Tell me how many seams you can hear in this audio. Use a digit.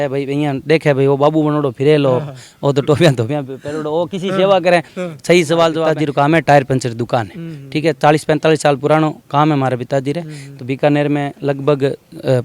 0